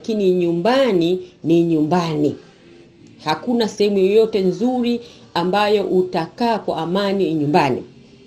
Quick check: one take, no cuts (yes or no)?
yes